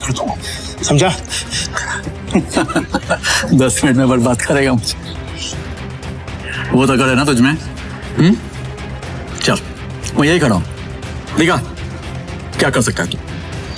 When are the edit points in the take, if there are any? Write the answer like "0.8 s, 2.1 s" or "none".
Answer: none